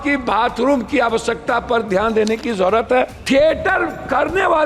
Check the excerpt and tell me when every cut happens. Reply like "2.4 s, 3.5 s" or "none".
3.2 s